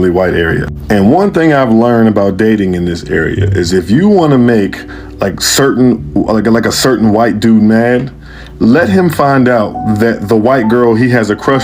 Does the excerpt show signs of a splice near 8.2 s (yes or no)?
no